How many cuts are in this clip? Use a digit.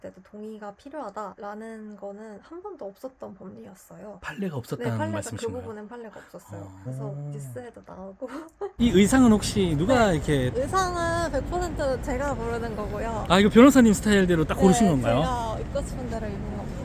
1